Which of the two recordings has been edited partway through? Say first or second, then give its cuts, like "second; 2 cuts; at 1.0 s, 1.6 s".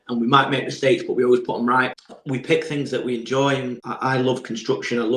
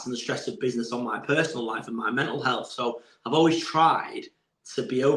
first; 2 cuts; at 2.0 s, 3.8 s